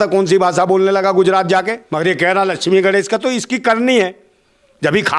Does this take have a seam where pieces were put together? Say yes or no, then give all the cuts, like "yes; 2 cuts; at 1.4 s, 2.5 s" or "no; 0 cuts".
yes; 1 cut; at 1.8 s